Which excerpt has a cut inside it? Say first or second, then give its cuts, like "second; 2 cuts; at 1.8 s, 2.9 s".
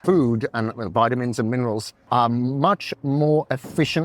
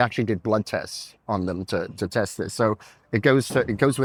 first; 1 cut; at 1.9 s